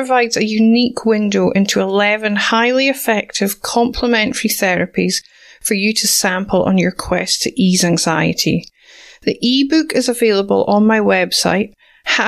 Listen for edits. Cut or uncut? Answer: uncut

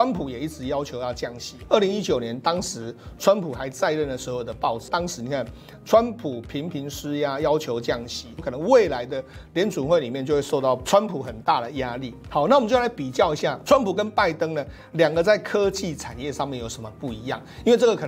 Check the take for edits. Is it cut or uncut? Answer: cut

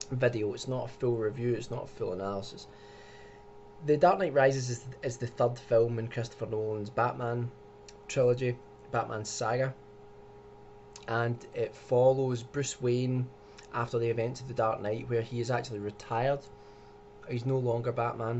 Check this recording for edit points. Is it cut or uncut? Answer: cut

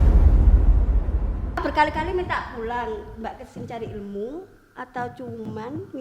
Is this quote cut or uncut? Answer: cut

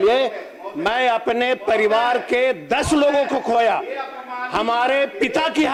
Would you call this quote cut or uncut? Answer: uncut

